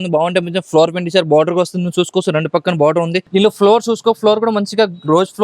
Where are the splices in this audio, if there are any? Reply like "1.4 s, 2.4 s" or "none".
3.3 s